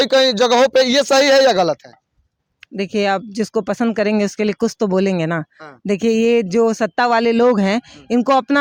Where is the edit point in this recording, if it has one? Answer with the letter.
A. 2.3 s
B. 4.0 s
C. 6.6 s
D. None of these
D